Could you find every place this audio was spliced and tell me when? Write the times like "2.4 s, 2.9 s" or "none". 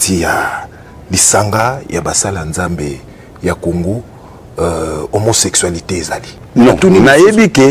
6.3 s